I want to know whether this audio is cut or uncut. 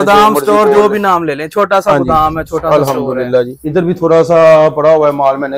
cut